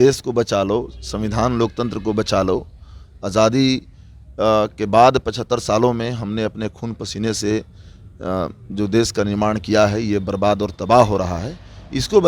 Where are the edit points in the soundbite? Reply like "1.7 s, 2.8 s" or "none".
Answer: none